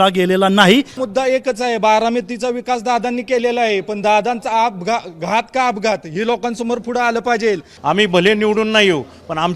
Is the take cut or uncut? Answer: cut